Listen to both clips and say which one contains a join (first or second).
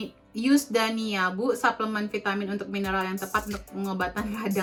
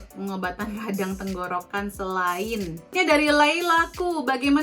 second